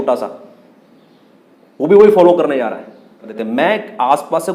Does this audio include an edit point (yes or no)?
yes